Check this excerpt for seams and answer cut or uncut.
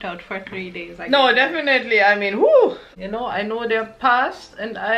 cut